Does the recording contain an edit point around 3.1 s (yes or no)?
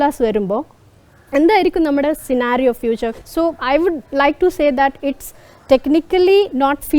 yes